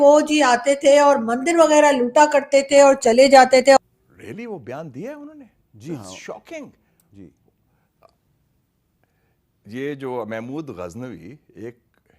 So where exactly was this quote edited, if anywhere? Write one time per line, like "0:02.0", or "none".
0:03.8

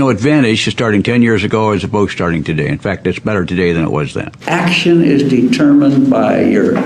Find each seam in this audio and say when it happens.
0:04.3

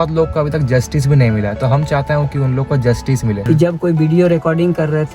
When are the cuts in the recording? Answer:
0:03.4

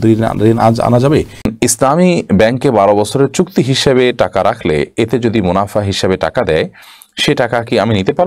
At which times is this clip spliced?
0:01.5

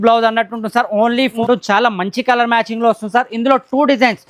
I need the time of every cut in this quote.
0:01.4

